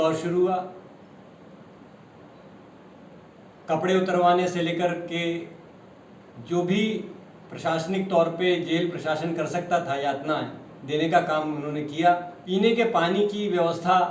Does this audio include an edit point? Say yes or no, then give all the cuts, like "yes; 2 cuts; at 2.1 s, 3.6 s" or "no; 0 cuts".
yes; 1 cut; at 12.3 s